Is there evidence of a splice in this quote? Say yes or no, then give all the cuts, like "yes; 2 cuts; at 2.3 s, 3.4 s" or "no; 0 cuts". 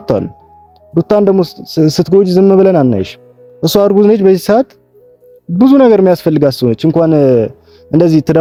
no; 0 cuts